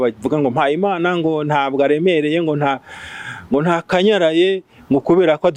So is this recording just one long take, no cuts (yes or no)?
yes